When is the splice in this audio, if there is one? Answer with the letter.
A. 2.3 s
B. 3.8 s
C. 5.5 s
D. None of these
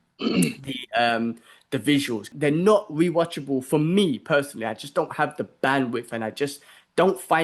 A